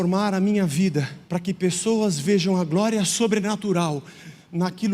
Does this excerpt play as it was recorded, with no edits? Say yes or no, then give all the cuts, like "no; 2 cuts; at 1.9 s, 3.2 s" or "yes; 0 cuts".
no; 1 cut; at 1.2 s